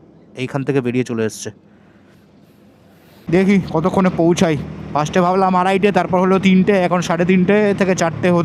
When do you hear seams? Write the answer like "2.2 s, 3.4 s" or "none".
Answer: 3.2 s